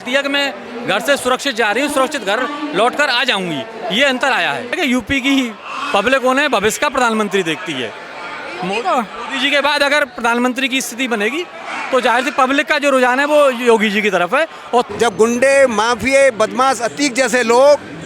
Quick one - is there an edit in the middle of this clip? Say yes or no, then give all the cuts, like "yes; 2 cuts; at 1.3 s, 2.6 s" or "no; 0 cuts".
yes; 2 cuts; at 4.7 s, 14.9 s